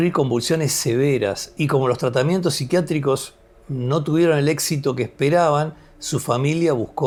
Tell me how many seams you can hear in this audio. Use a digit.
0